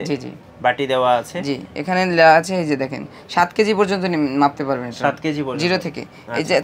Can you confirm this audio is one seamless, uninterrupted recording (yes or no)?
yes